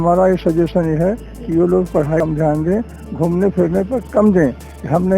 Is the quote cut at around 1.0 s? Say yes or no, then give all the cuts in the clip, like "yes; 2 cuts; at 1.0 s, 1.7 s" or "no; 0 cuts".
no; 1 cut; at 2.2 s